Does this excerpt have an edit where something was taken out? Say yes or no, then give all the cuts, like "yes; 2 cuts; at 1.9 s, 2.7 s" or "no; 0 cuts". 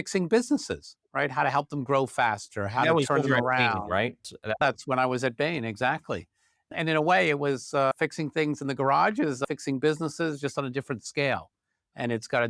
yes; 4 cuts; at 4.6 s, 6.7 s, 7.9 s, 9.4 s